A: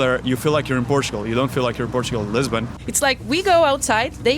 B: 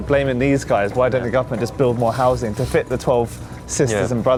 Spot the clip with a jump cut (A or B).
A